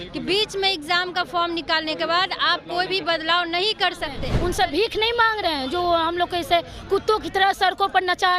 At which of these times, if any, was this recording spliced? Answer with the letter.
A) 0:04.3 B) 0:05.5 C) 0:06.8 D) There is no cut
A